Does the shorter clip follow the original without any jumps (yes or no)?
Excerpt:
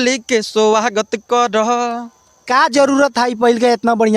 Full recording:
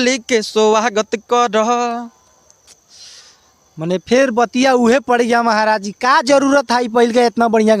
no